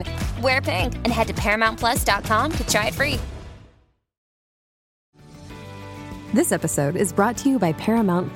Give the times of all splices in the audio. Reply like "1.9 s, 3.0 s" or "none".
4.8 s